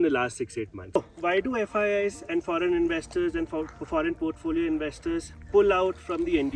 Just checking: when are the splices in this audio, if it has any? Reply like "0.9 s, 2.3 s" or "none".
1.0 s